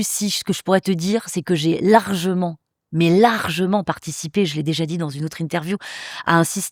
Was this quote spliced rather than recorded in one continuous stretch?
no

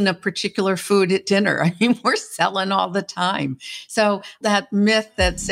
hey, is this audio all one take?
no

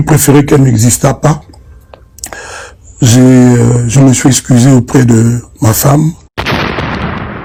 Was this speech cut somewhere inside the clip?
no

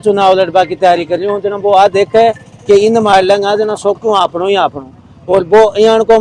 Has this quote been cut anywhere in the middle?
no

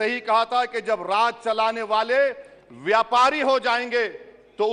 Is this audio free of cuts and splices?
yes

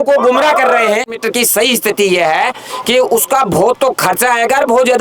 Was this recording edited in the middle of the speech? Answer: yes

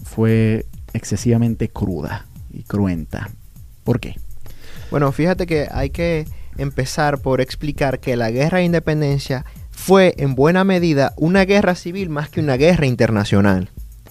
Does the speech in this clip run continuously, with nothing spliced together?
no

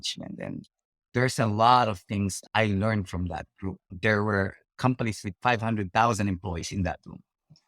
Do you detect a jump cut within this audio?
yes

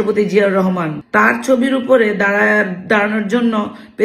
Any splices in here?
yes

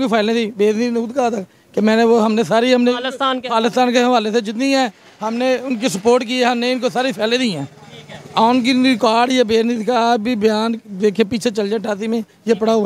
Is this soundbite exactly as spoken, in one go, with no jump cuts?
yes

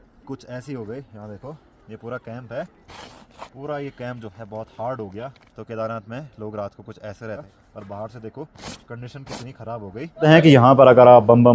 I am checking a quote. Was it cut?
yes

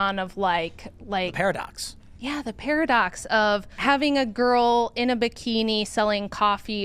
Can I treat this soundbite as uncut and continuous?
no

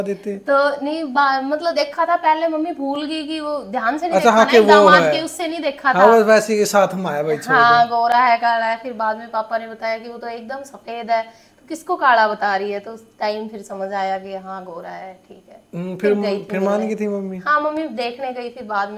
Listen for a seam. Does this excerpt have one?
no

